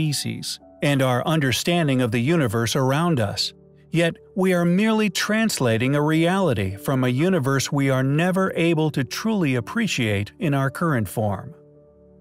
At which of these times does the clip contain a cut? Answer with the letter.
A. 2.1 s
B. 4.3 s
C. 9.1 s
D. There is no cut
C